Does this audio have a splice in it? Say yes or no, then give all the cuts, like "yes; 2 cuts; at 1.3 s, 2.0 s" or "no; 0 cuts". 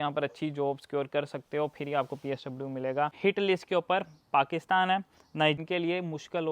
yes; 2 cuts; at 3.2 s, 5.6 s